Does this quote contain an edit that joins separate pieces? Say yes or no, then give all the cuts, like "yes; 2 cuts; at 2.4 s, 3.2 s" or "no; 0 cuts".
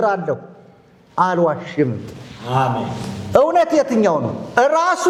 no; 0 cuts